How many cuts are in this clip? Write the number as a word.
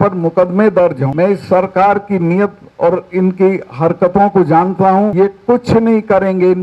two